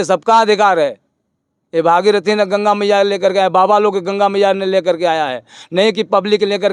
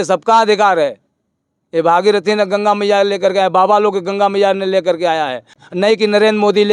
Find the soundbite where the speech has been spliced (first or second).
second